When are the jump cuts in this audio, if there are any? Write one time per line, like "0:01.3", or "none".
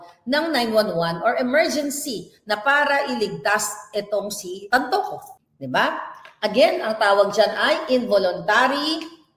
0:04.6